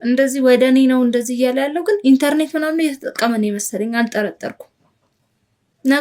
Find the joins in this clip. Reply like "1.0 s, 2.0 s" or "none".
none